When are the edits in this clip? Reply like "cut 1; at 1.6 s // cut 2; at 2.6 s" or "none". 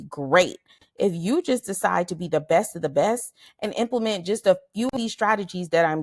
cut 1; at 4.9 s

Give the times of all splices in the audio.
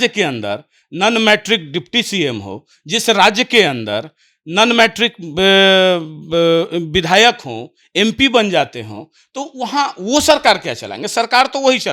none

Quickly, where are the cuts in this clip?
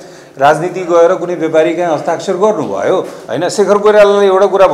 cut 1; at 3.2 s

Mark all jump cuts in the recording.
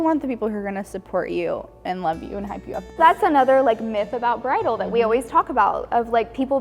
cut 1; at 3.0 s

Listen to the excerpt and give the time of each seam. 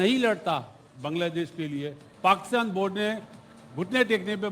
cut 1; at 2.0 s

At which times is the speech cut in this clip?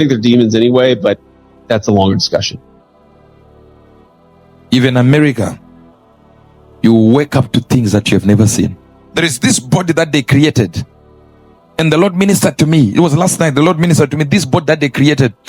cut 1; at 2.6 s // cut 2; at 4.7 s

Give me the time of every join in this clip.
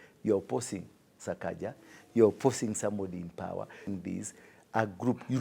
cut 1; at 3.9 s

